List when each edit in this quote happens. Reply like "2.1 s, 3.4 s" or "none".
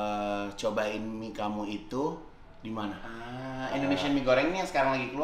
3.2 s